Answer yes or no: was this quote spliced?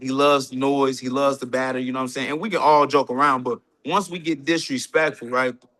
no